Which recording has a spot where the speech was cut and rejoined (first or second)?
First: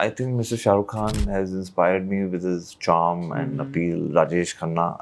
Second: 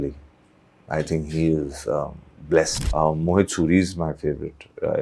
second